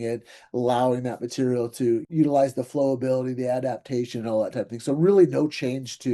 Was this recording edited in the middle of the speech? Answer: yes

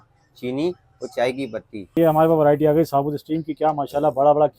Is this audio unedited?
no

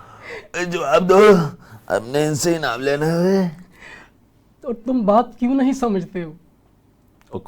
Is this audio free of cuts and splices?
yes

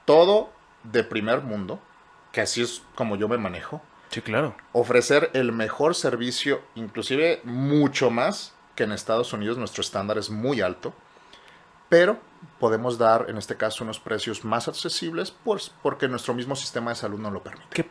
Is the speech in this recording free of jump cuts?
yes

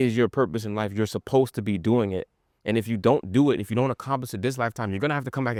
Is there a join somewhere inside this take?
no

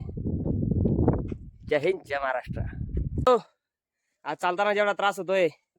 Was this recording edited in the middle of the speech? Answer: yes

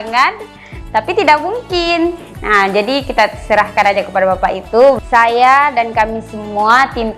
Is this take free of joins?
no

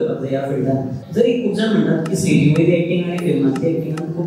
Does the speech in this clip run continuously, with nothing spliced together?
no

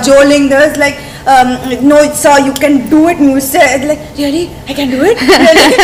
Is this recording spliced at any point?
no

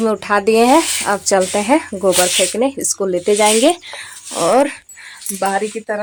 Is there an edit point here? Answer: no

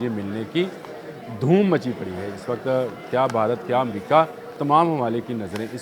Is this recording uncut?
no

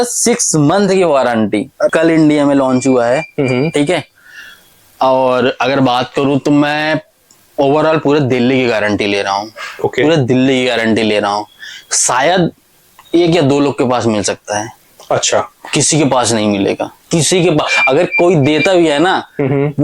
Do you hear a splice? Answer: yes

